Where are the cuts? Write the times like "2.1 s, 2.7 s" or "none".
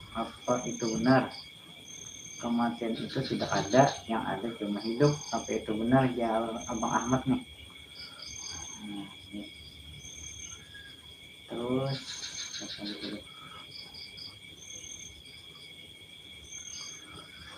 none